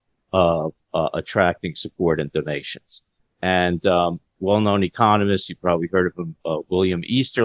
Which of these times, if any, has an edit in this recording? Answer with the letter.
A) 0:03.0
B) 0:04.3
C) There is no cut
B